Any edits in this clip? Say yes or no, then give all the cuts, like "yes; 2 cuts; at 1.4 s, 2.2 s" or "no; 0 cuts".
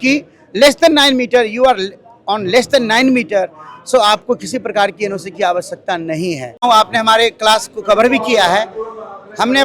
yes; 1 cut; at 6.6 s